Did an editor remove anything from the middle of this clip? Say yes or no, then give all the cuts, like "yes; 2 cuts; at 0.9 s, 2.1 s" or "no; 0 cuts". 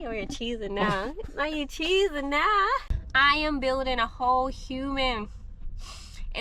yes; 1 cut; at 2.9 s